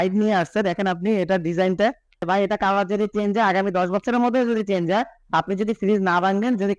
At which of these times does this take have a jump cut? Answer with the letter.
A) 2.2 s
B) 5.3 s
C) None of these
A